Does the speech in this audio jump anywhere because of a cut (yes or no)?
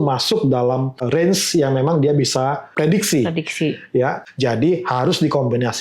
yes